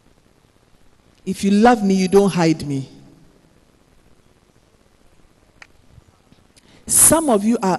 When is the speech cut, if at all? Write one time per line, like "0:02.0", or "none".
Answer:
0:05.7